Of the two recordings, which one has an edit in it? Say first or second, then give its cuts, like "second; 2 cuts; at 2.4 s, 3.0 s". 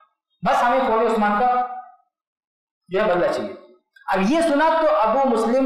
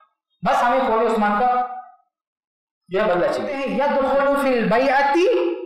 second; 1 cut; at 3.6 s